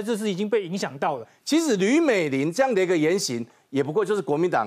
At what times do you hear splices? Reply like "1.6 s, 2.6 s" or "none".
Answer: 1.3 s